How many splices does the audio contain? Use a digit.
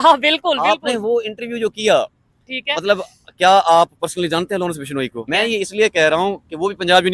1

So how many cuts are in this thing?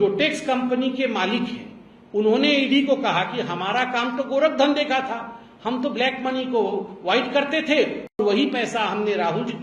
1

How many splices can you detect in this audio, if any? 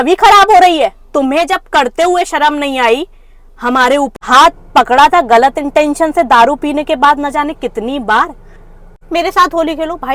2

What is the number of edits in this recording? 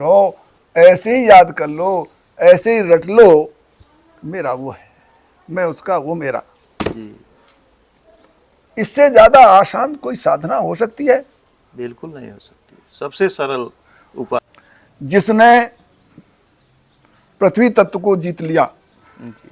1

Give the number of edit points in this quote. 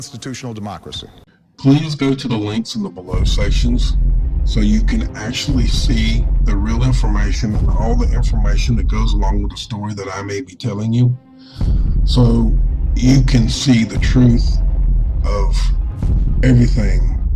0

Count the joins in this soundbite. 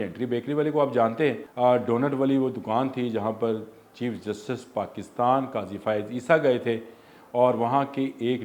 1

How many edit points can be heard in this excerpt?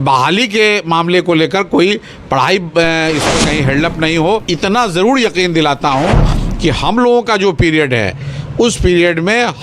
1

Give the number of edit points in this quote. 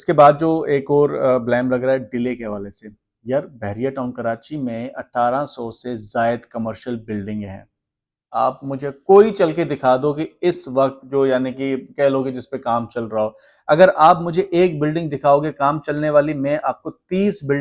0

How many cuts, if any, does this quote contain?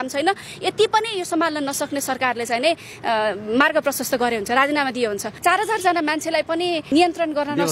1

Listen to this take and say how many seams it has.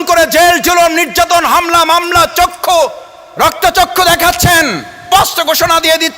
1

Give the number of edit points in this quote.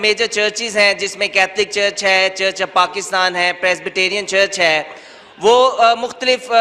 0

